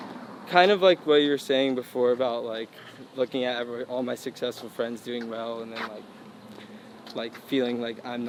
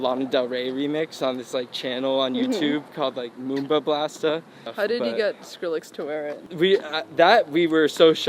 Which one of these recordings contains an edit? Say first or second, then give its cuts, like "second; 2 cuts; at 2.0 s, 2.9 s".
second; 2 cuts; at 4.7 s, 6.4 s